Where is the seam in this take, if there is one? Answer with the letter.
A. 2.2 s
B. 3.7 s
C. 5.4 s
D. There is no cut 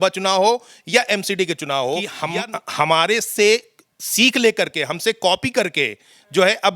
A